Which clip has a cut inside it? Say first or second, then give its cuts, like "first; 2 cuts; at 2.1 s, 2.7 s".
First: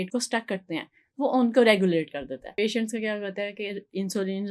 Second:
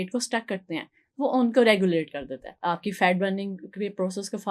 first; 1 cut; at 2.4 s